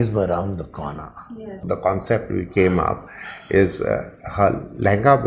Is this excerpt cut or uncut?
cut